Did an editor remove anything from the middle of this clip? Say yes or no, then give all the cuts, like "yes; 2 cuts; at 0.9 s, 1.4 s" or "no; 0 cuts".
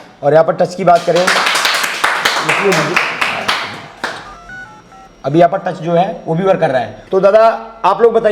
yes; 1 cut; at 6.6 s